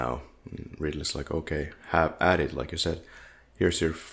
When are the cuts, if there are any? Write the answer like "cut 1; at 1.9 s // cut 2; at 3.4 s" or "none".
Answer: none